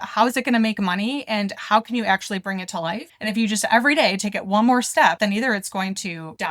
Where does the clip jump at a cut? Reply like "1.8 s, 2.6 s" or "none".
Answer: 3.1 s